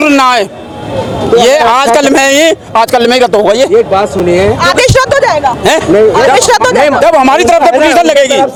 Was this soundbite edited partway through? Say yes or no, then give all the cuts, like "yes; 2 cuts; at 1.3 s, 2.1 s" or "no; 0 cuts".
no; 0 cuts